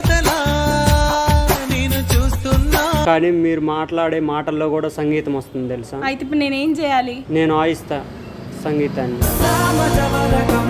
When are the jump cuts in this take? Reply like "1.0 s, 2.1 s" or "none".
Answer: 3.0 s